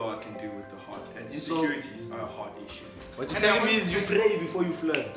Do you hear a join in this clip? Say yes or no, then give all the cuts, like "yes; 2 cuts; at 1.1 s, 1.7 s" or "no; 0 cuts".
no; 0 cuts